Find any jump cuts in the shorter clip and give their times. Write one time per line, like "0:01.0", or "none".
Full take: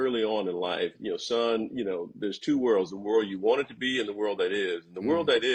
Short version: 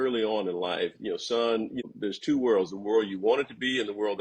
0:01.8

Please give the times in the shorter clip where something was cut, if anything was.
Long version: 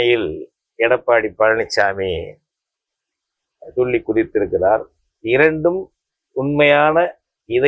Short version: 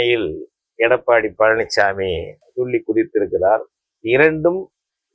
0:02.4

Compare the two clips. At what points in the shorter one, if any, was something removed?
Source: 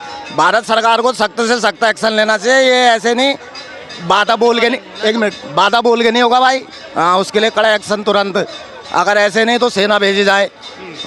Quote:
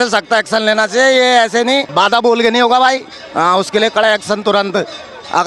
0:01.9

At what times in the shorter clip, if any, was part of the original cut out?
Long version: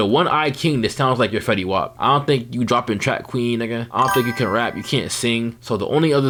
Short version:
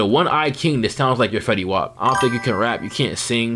0:01.9

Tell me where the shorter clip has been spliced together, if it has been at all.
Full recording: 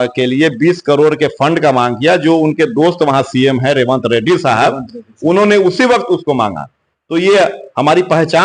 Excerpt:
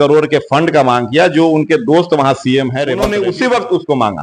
0:03.0

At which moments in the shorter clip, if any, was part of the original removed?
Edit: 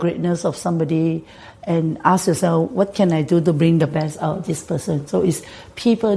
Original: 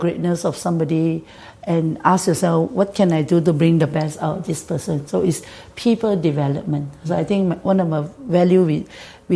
none

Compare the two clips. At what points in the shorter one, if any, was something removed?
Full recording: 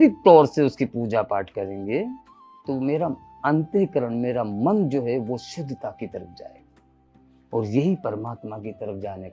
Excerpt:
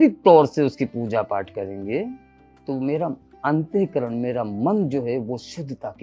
none

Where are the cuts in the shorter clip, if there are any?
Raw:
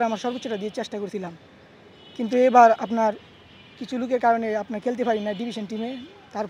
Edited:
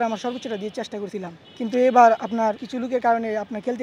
0:01.4
0:02.7

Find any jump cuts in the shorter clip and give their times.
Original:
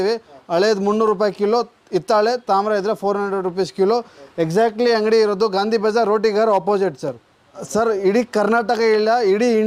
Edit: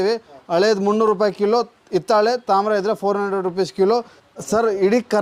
0:04.2

